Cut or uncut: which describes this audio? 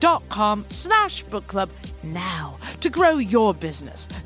uncut